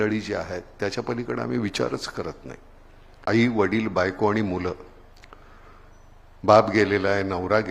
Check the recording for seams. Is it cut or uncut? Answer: cut